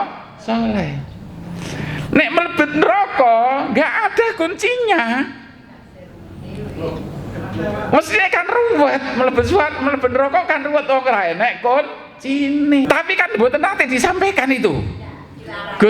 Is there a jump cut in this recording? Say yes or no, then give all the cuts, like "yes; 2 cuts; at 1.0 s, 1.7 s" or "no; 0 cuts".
yes; 1 cut; at 12.9 s